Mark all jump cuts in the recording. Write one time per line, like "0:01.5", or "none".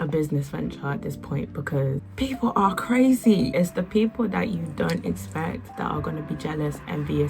0:02.1
0:03.5
0:05.7